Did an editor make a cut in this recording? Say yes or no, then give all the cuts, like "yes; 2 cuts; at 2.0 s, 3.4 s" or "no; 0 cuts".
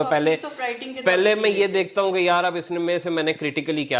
no; 0 cuts